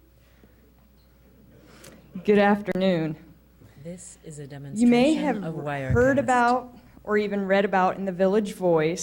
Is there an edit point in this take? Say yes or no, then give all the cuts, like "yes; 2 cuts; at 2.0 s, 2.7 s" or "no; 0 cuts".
yes; 2 cuts; at 3.8 s, 4.7 s